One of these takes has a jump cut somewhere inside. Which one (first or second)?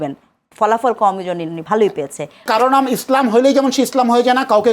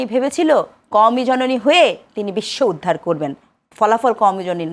first